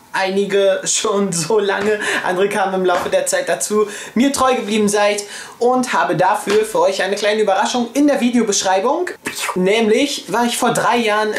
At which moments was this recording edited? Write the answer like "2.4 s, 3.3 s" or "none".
4.6 s